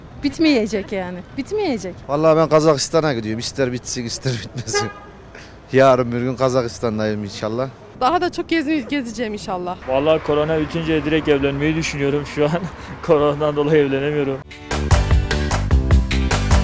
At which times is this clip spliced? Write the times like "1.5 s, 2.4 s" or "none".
2.0 s, 7.8 s, 9.7 s, 14.5 s